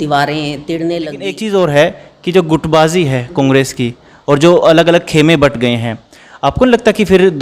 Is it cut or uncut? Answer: cut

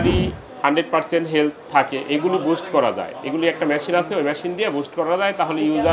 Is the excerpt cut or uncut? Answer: uncut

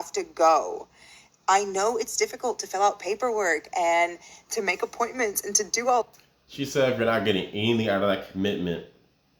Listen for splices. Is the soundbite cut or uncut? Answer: uncut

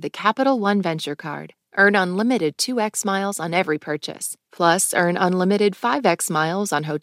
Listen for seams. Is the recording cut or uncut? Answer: uncut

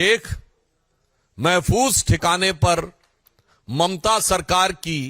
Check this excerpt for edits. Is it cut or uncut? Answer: uncut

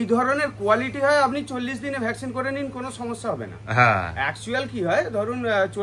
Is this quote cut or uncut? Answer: uncut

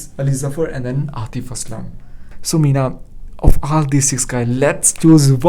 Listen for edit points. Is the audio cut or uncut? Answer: cut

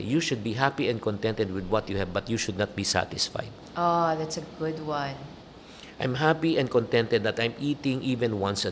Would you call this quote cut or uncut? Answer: uncut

